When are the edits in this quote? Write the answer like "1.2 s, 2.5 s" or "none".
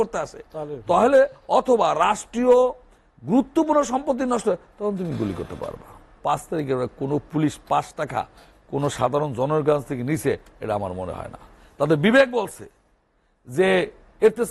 6.2 s

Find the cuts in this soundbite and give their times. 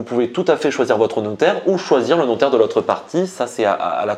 none

